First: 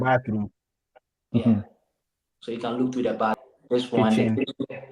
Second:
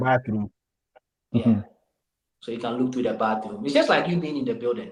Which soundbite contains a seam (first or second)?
first